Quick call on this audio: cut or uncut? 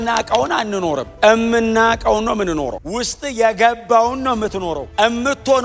cut